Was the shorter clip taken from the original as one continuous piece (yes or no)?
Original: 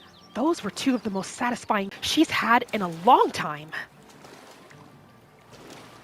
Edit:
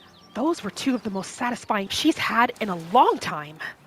no